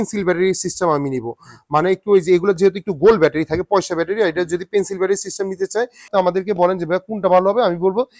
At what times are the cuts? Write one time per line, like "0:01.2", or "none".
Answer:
0:06.1